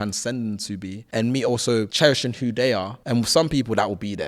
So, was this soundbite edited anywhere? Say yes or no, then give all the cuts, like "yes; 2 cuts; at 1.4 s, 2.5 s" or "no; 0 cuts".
yes; 3 cuts; at 1.0 s, 1.9 s, 2.9 s